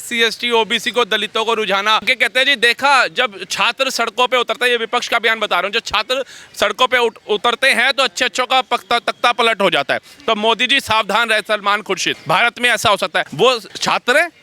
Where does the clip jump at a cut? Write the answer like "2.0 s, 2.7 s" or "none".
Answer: 2.1 s, 12.1 s, 13.4 s